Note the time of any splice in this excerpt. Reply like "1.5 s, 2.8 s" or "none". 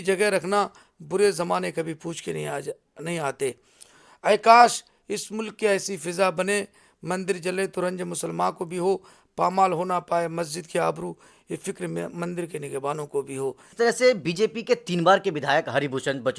13.7 s